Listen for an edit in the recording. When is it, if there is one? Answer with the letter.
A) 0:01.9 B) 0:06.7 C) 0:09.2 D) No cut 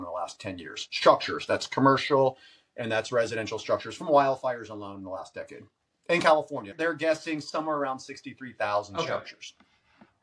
B